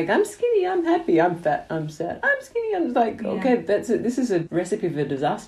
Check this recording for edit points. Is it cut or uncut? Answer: cut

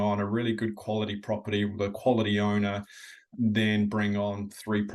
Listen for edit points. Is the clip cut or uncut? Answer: cut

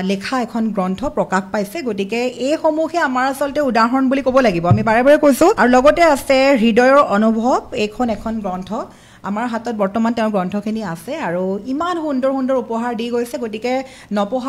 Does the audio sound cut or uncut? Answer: cut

